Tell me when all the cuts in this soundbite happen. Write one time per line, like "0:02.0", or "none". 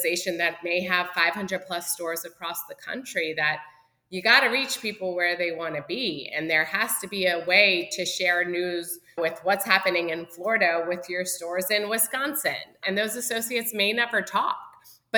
0:12.8